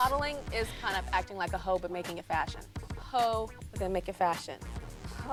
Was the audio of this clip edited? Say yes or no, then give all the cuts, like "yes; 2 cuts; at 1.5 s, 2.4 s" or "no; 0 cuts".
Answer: no; 0 cuts